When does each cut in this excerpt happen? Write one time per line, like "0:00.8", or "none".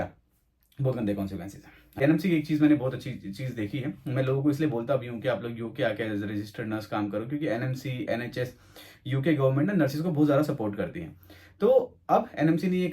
0:02.0